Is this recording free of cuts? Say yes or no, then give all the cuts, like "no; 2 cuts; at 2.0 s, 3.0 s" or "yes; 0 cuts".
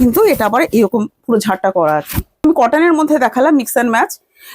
no; 1 cut; at 2.4 s